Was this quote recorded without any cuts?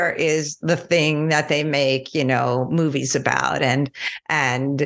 yes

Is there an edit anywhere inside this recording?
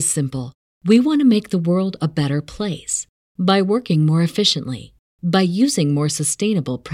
no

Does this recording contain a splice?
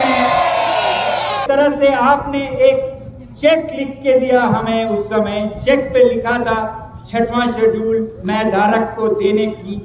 yes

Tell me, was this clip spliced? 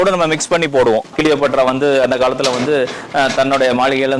yes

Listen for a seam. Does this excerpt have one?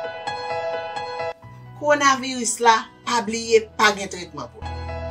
yes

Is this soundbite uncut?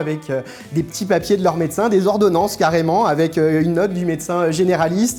yes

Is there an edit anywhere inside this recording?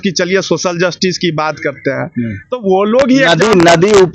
no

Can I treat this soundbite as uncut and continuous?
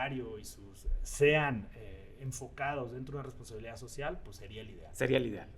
yes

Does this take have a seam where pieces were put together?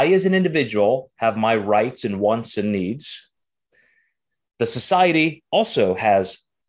no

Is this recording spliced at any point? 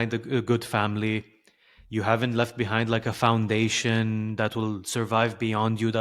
no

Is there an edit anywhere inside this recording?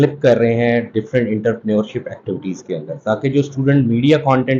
no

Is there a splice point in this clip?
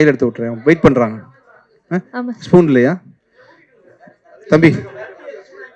no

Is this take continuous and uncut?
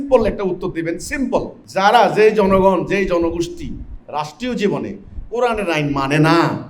no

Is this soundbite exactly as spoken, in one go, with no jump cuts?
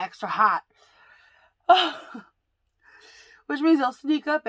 yes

